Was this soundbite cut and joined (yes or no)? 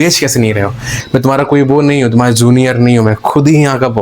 yes